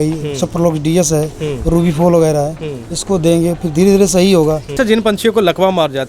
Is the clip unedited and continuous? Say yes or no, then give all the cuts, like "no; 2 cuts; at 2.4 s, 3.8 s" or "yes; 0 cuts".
no; 1 cut; at 4.7 s